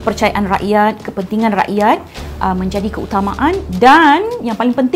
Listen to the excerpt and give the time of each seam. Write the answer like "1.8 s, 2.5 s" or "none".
none